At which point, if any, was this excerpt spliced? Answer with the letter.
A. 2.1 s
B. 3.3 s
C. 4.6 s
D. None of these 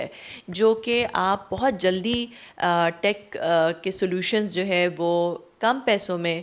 D